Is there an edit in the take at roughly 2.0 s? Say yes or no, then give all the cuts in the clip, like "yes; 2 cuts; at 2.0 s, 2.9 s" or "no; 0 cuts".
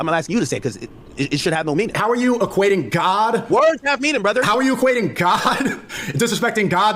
yes; 2 cuts; at 2.0 s, 4.3 s